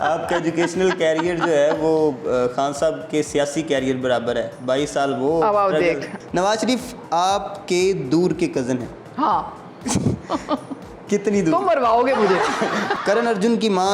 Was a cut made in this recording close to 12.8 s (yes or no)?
yes